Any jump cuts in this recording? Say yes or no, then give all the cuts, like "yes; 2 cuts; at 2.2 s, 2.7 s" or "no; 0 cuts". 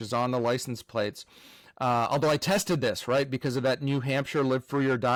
no; 0 cuts